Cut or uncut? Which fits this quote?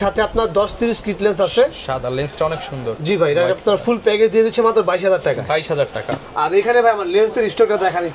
uncut